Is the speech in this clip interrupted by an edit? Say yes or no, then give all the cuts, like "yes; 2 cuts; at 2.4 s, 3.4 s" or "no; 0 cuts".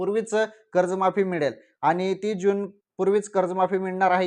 no; 0 cuts